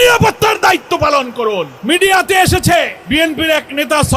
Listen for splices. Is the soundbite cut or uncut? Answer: cut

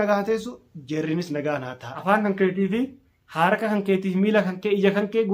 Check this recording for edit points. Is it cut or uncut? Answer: cut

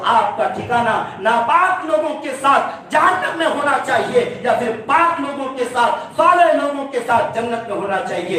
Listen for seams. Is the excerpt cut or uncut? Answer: uncut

